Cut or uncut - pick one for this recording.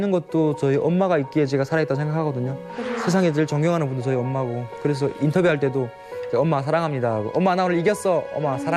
uncut